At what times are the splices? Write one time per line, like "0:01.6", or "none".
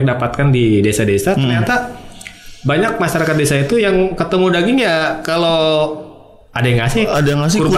none

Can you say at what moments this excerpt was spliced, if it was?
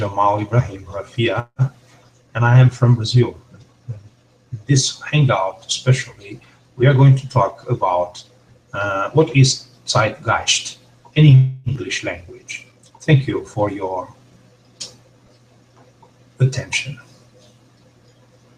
none

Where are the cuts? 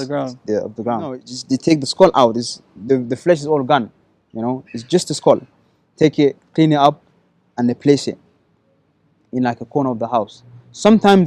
0:01.3

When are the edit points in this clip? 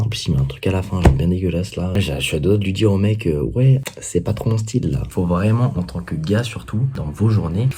0:03.9
0:05.0
0:06.9

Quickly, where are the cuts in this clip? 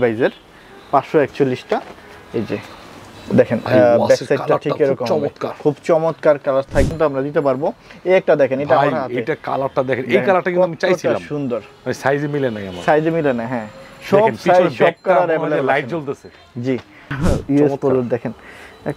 0:06.9
0:17.1

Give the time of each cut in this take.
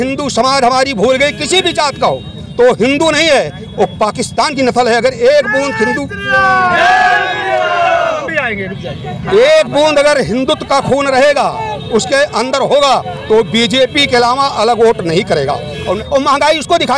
0:16.0

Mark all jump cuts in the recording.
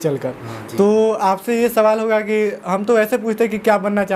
none

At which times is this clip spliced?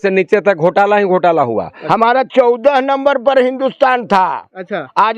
0:01.8

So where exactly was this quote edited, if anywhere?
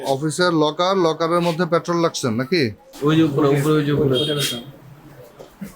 0:02.8

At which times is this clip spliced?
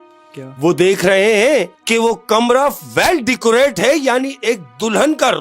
0:01.8

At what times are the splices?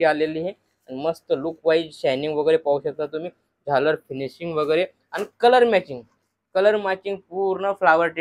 none

